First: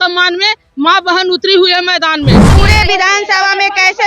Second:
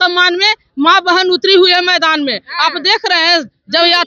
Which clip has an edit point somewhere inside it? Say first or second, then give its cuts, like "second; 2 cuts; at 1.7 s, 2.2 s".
first; 1 cut; at 2.4 s